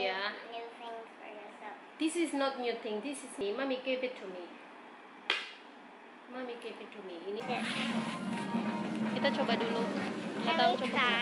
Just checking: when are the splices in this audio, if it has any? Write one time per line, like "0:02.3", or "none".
0:03.4
0:07.4